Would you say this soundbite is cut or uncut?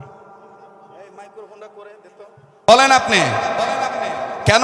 cut